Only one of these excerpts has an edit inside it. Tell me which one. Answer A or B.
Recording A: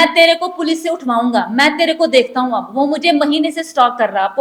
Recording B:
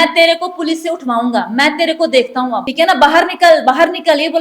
B